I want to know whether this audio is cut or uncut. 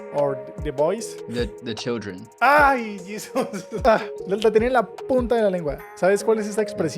cut